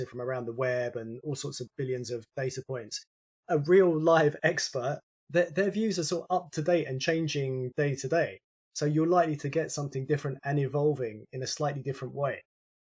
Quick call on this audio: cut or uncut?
cut